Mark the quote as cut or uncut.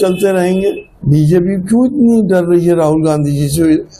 cut